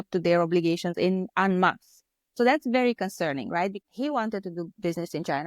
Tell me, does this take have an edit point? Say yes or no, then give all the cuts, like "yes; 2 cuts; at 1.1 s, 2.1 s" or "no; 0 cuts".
yes; 2 cuts; at 0.9 s, 3.8 s